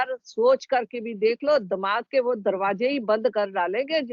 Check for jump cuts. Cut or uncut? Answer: uncut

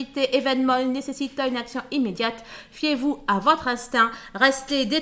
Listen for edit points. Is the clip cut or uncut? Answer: uncut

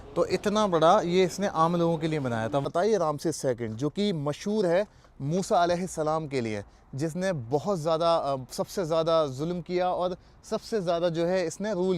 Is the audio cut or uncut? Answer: cut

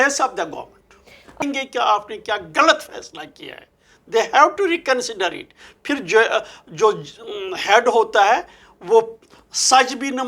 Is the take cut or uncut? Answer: cut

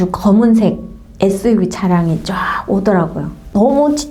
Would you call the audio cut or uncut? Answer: uncut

